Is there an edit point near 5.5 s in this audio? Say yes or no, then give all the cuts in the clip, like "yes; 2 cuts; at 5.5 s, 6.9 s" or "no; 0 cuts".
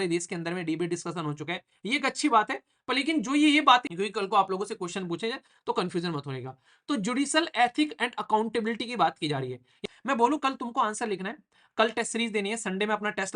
no; 2 cuts; at 3.9 s, 9.7 s